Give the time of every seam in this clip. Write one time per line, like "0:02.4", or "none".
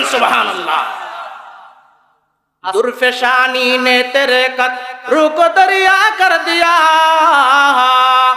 0:02.7

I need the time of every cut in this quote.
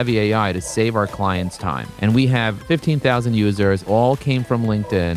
0:01.9
0:02.6
0:03.8

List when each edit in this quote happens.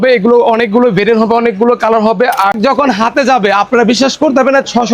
0:02.6

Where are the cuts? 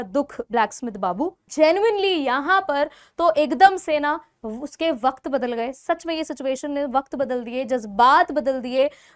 0:01.4

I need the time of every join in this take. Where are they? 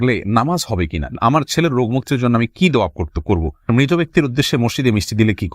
0:01.1
0:03.7

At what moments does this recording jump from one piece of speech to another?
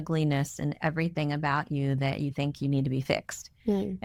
none

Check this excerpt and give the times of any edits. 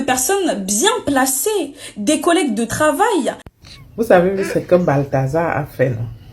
0:03.4

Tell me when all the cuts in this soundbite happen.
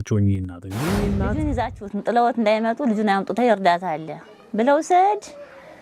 0:01.1

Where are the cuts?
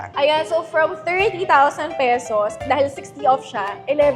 none

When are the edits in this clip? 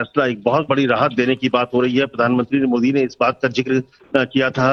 none

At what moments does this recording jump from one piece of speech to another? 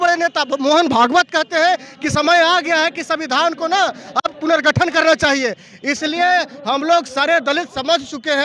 none

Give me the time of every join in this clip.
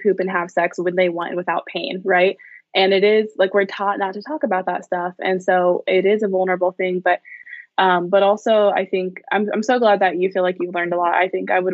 0:07.4

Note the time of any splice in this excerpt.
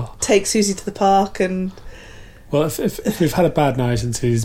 none

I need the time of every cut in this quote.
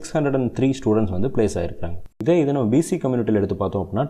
0:02.0

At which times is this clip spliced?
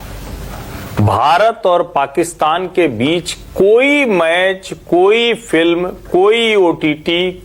none

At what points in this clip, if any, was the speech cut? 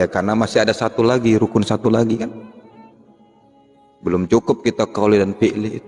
none

